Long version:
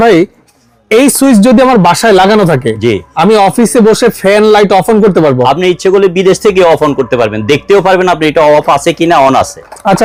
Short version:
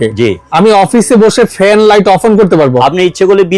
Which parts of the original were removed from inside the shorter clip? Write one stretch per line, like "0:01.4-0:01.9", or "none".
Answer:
none

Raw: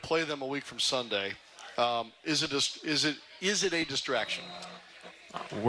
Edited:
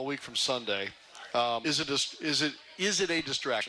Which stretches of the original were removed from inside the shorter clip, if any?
0:02.0-0:02.2

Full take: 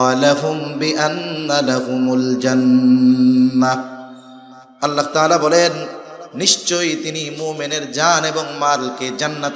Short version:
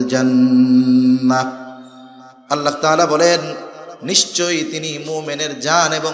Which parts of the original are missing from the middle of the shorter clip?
none

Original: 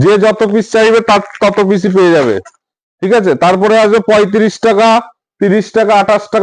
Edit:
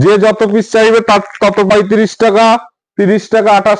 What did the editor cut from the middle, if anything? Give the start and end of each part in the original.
0:01.7-0:04.1

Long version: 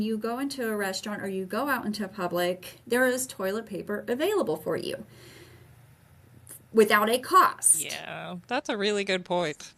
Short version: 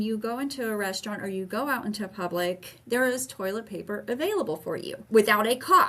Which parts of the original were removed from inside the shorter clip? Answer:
0:05.0-0:06.6

